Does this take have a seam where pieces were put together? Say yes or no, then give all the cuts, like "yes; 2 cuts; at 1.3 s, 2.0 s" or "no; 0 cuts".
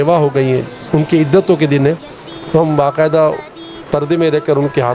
no; 0 cuts